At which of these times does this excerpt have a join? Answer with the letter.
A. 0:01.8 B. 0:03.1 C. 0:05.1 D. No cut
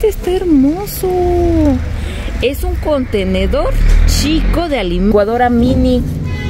C